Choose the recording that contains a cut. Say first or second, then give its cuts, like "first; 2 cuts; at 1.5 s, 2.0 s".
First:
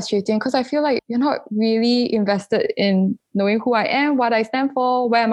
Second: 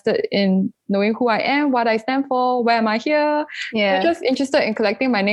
first; 1 cut; at 1.0 s